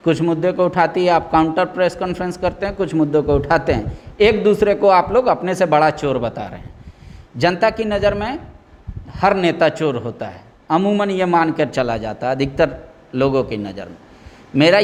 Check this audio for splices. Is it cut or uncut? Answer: uncut